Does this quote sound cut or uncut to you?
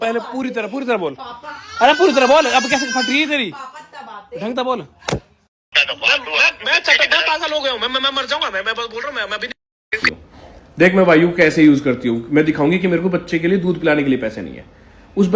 cut